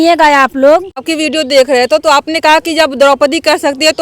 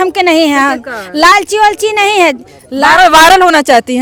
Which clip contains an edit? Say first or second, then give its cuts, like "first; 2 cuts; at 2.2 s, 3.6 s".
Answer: first; 1 cut; at 1.0 s